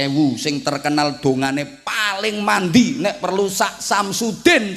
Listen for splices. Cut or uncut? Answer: uncut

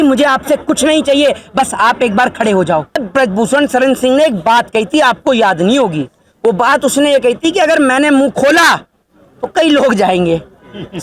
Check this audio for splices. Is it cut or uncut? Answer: cut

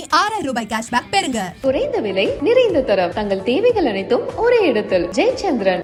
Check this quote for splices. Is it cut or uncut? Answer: uncut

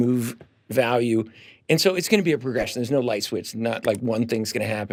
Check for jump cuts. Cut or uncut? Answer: uncut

